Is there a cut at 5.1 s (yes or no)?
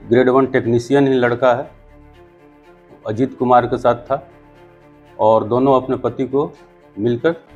no